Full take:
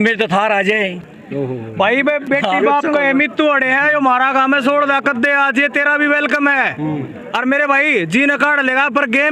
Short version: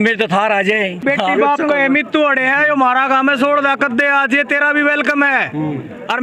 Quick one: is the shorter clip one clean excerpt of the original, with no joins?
no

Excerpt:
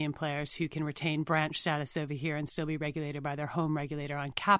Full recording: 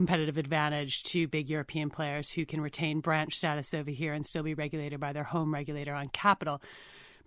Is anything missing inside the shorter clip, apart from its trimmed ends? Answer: no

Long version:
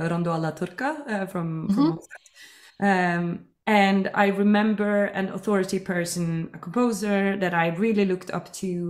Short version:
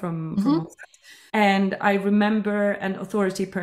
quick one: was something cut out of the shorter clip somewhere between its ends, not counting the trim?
yes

